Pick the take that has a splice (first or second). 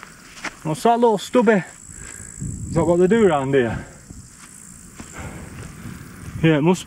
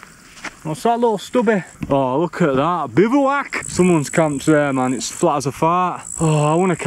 second